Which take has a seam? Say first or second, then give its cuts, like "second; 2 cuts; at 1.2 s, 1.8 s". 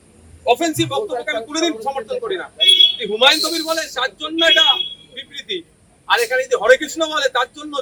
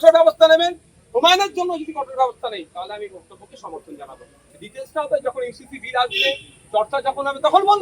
second; 1 cut; at 4.4 s